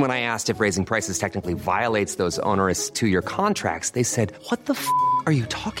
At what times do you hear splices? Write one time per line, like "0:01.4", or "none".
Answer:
none